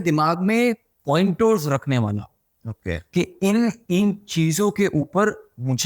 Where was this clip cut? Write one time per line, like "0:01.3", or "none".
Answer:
none